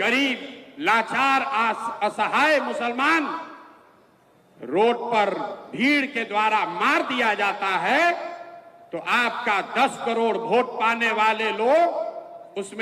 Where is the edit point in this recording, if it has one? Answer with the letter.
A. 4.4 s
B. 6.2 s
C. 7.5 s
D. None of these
D